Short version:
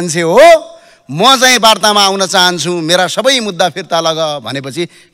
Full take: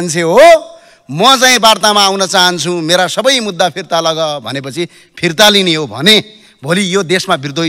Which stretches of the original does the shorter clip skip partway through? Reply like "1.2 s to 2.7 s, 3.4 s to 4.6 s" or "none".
none